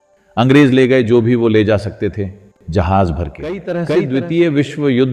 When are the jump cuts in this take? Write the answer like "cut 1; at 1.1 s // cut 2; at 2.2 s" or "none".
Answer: cut 1; at 3.8 s